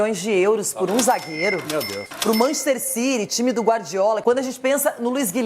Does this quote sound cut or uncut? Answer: cut